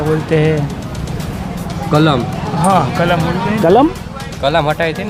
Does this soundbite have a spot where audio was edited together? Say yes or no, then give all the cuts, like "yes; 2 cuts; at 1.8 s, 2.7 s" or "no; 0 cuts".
no; 0 cuts